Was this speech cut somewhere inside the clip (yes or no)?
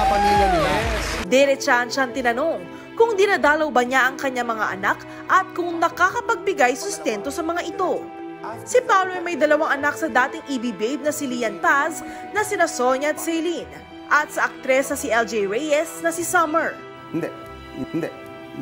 yes